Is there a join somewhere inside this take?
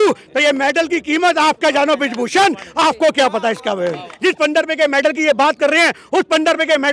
yes; 1 cut; at 4.1 s

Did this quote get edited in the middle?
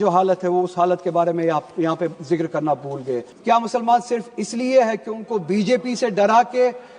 yes; 1 cut; at 3.3 s

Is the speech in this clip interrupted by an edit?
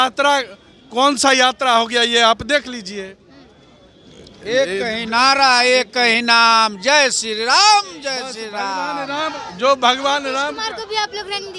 no; 0 cuts

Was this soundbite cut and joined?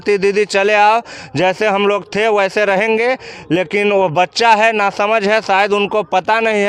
no; 0 cuts

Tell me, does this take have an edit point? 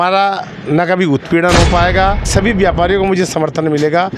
yes; 1 cut; at 2.3 s

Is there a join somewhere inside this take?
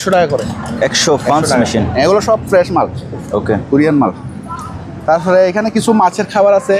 no; 0 cuts

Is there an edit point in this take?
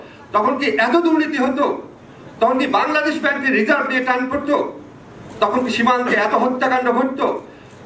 no; 0 cuts

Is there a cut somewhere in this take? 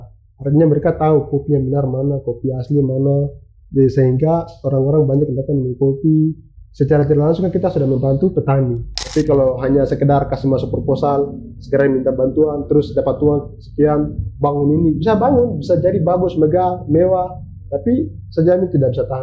yes; 1 cut; at 8.9 s

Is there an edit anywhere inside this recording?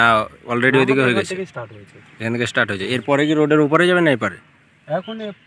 no; 0 cuts

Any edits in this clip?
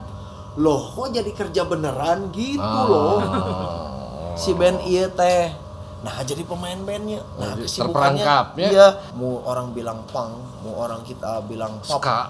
yes; 1 cut; at 9.1 s

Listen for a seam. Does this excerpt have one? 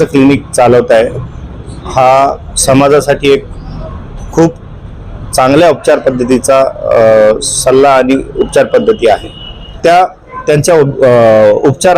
yes; 1 cut; at 9.7 s

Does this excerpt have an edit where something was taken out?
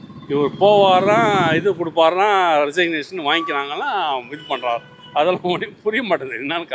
no; 0 cuts

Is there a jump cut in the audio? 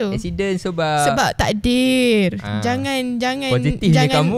no; 0 cuts

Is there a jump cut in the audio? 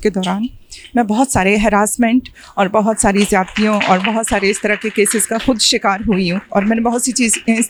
no; 0 cuts

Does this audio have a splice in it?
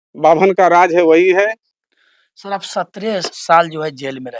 yes; 1 cut; at 1.6 s

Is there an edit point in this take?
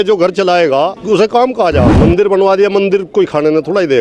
yes; 2 cuts; at 1.0 s, 1.9 s

